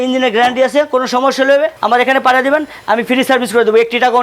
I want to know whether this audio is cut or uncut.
uncut